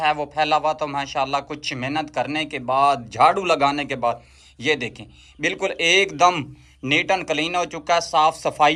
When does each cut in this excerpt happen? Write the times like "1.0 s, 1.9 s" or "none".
none